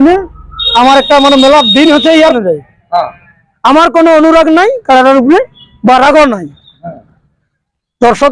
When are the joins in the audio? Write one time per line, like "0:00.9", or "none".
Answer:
0:02.3